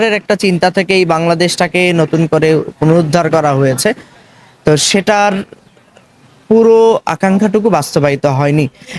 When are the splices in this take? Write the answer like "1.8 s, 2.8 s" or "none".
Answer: none